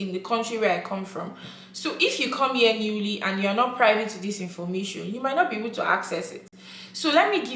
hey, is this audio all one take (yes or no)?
yes